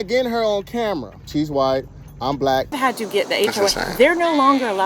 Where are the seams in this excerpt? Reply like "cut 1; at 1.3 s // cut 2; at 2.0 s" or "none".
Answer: cut 1; at 1.2 s // cut 2; at 2.7 s